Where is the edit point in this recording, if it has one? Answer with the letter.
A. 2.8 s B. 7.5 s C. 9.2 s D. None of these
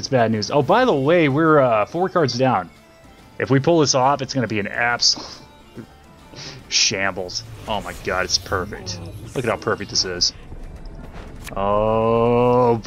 B